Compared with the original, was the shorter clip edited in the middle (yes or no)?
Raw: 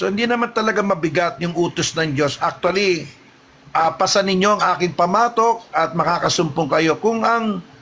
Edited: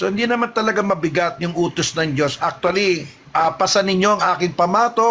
yes